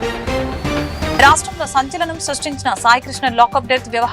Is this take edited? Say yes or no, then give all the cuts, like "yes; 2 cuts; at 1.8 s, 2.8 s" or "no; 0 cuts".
yes; 1 cut; at 1.1 s